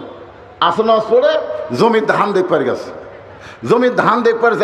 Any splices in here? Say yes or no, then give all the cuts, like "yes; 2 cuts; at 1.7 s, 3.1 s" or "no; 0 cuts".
no; 0 cuts